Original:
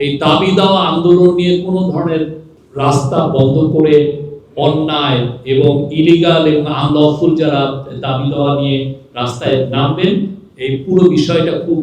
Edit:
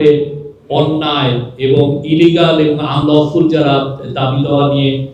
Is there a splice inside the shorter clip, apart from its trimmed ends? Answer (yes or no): no